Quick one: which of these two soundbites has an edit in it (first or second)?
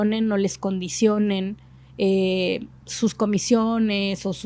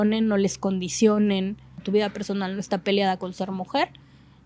second